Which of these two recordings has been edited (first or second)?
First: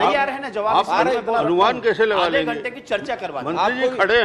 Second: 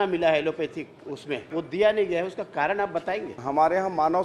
second